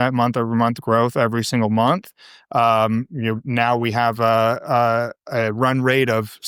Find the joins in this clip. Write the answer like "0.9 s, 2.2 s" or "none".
none

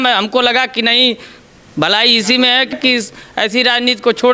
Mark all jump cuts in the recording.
2.8 s

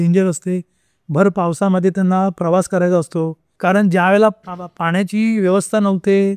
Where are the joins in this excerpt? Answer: 3.4 s

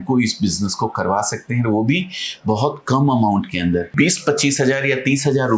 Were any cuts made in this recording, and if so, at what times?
3.9 s

